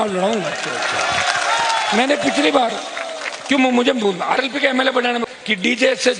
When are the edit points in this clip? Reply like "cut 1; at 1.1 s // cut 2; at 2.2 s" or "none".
cut 1; at 5.3 s